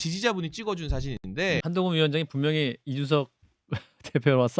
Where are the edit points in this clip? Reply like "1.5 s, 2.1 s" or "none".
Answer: 1.6 s